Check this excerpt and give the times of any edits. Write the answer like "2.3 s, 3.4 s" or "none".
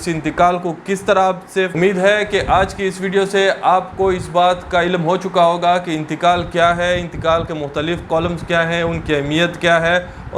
1.7 s